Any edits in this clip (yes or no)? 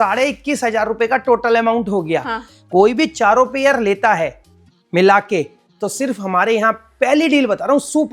no